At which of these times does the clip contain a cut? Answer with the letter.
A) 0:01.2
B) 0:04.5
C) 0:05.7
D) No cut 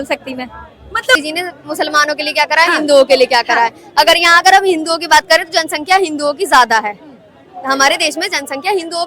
A